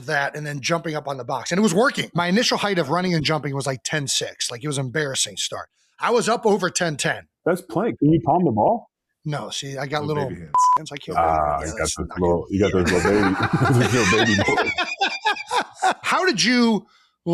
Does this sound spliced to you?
yes; 3 cuts; at 2.0 s, 7.4 s, 16.0 s

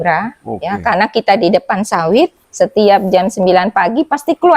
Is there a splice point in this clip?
yes; 1 cut; at 2.4 s

